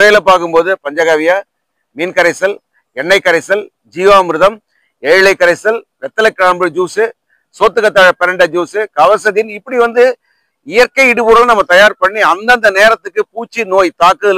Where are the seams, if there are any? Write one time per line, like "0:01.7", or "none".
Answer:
none